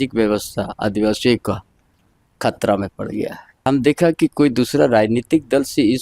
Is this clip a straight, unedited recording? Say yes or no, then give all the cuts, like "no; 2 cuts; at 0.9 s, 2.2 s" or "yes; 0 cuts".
no; 1 cut; at 3.6 s